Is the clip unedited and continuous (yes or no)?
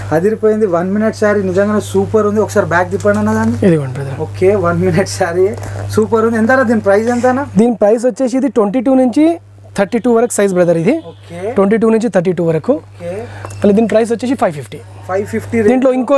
yes